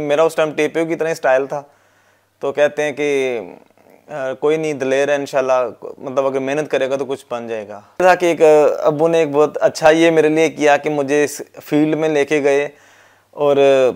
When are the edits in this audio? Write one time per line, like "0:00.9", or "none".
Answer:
0:08.0